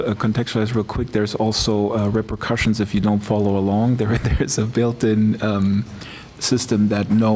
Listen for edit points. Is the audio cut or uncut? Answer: uncut